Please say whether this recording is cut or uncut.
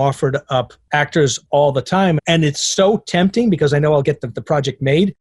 cut